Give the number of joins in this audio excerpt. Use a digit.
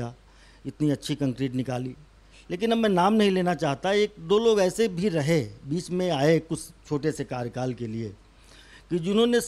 0